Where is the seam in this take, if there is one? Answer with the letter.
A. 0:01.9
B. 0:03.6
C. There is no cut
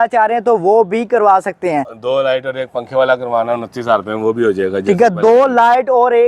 C